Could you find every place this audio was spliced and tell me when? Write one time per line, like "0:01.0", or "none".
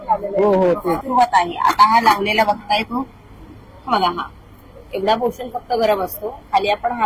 0:01.0